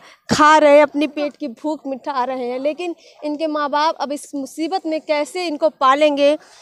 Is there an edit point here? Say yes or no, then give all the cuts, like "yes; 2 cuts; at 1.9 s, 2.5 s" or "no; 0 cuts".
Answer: no; 0 cuts